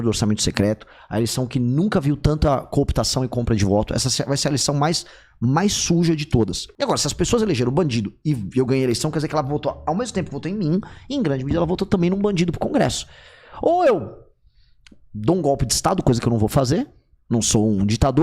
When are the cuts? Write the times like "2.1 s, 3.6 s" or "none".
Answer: 6.7 s